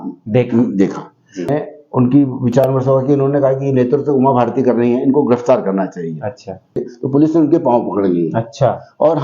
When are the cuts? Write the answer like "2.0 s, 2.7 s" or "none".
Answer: 1.5 s, 6.9 s